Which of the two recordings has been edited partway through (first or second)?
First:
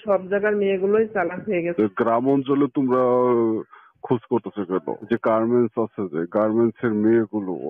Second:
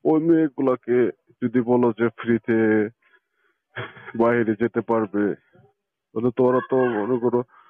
first